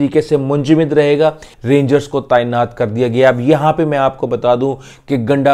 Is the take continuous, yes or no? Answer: no